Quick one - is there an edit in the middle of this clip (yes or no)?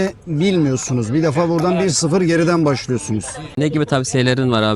yes